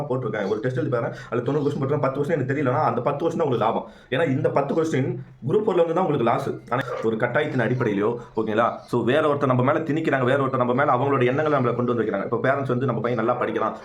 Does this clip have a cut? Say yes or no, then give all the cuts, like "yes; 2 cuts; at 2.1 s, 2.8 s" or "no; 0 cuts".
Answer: yes; 1 cut; at 6.8 s